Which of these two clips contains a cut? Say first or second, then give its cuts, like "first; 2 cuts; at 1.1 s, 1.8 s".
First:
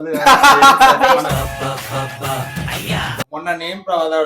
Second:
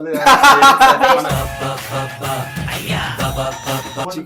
first; 1 cut; at 3.2 s